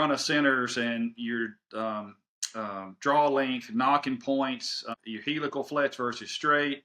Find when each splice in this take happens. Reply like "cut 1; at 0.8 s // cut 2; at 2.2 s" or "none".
cut 1; at 4.9 s